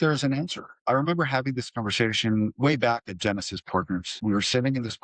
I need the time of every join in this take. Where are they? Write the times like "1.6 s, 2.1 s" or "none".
0.8 s, 2.5 s, 4.1 s